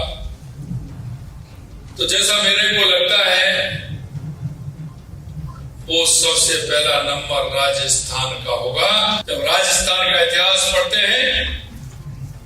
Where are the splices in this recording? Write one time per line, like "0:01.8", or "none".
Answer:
0:09.2